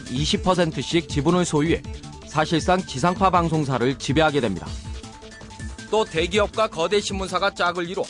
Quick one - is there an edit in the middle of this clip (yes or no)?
yes